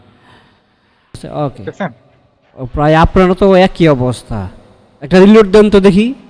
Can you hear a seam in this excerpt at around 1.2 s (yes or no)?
yes